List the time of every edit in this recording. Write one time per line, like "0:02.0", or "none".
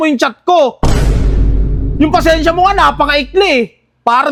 none